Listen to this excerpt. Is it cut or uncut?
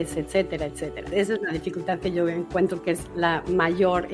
cut